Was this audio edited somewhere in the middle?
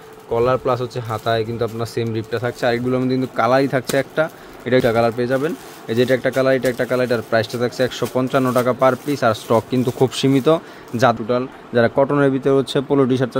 yes; 2 cuts; at 4.8 s, 11.2 s

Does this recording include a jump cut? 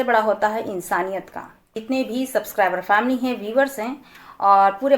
yes; 1 cut; at 1.8 s

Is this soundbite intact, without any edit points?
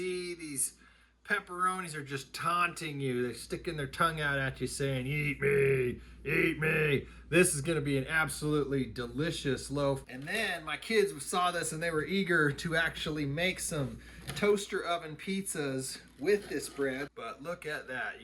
no; 2 cuts; at 10.1 s, 17.1 s

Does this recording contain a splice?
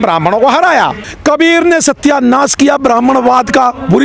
yes; 1 cut; at 1.1 s

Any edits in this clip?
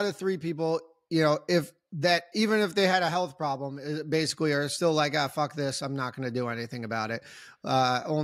no; 0 cuts

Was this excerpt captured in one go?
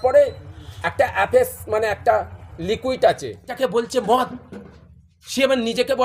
no; 1 cut; at 3.5 s

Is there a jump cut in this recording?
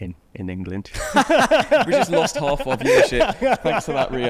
no; 0 cuts

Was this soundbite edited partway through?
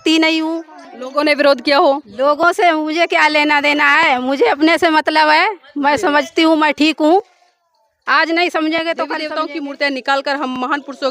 yes; 1 cut; at 9.2 s

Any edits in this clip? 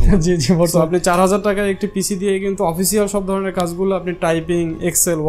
no; 0 cuts

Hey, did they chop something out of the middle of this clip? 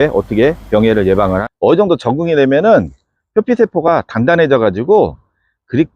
yes; 1 cut; at 1.4 s

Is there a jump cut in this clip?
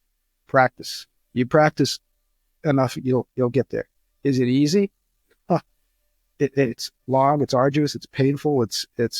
no; 0 cuts

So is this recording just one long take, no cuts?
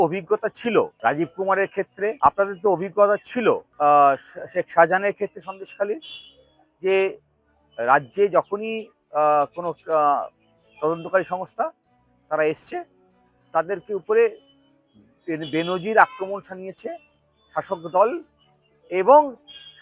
no; 3 cuts; at 0.9 s, 2.2 s, 3.7 s

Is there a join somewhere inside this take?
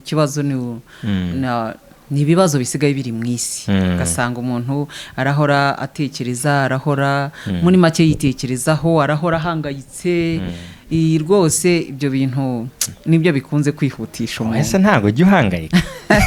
no; 0 cuts

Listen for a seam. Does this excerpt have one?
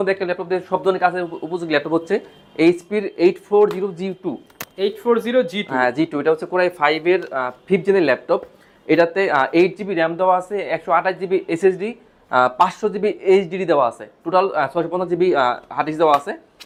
no; 0 cuts

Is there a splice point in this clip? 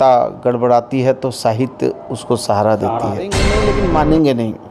yes; 1 cut; at 3.5 s

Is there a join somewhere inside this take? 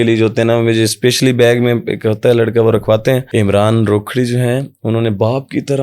yes; 1 cut; at 3.3 s

